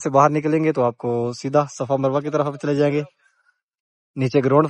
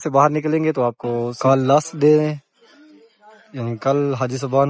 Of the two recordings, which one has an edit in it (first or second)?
second